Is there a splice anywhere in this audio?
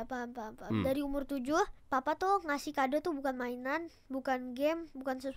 yes; 1 cut; at 1.8 s

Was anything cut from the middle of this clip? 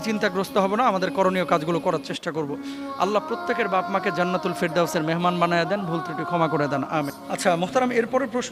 no; 0 cuts

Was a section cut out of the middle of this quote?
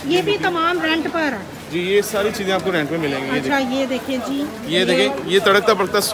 no; 0 cuts

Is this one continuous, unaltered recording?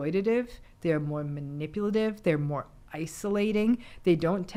yes; 0 cuts

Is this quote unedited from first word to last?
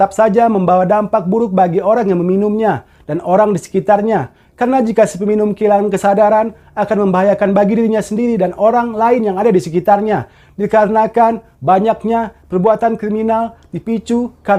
yes; 0 cuts

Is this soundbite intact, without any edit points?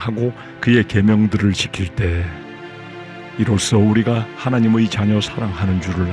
yes; 0 cuts

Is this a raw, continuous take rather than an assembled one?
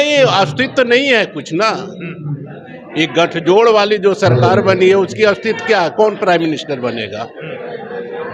yes; 0 cuts

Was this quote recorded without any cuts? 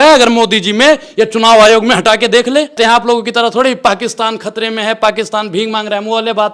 no; 1 cut; at 2.8 s

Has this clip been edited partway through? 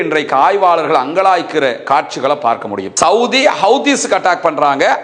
yes; 1 cut; at 2.9 s

